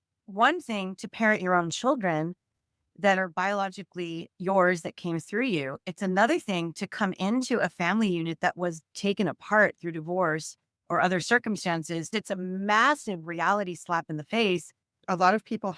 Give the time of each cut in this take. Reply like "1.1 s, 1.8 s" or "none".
12.1 s, 14.9 s